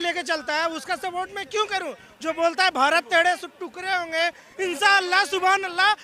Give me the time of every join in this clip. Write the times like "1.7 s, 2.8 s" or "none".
none